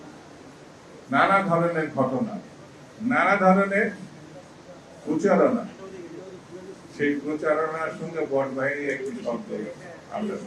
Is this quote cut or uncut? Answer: uncut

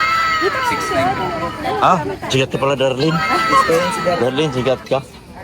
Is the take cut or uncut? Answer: cut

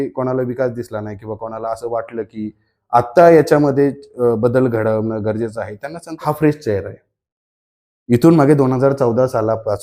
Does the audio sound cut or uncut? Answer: cut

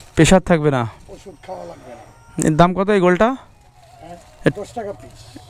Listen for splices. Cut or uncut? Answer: uncut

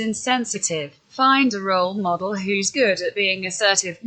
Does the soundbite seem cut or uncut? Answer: cut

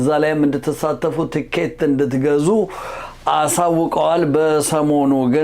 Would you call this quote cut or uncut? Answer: uncut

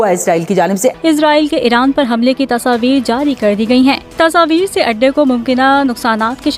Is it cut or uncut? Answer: cut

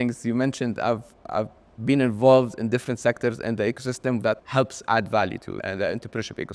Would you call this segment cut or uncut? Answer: cut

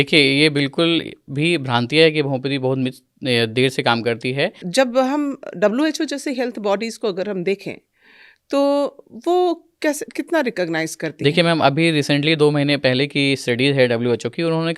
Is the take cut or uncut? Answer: cut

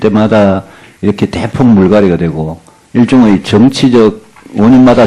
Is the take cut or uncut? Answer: uncut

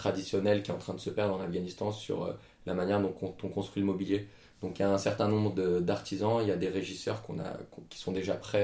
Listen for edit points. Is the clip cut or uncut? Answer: uncut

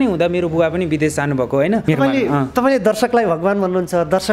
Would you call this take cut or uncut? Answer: cut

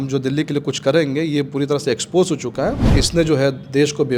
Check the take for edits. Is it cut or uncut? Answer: cut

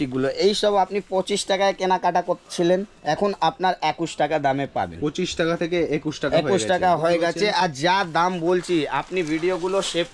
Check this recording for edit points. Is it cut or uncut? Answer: uncut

